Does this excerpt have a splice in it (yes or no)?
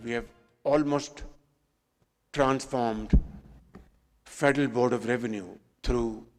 no